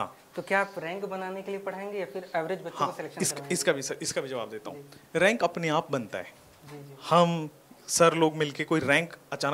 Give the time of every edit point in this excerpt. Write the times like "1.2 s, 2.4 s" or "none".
none